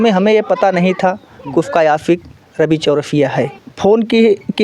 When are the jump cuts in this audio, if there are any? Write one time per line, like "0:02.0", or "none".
0:03.6